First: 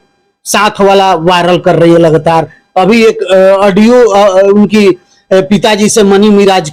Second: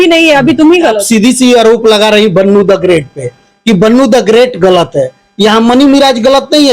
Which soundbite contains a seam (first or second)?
second